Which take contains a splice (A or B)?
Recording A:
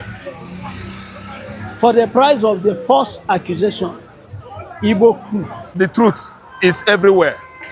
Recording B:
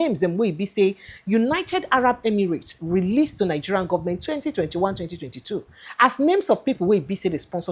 A